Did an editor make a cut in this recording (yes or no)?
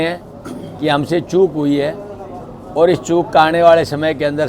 no